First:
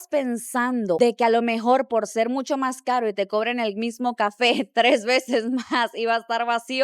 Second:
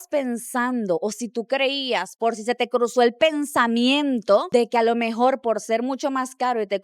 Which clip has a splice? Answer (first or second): first